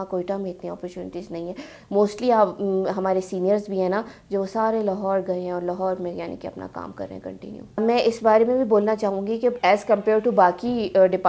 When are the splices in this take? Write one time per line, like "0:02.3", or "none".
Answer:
none